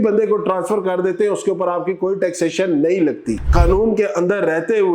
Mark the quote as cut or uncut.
cut